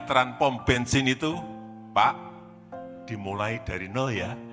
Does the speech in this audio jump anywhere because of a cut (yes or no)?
no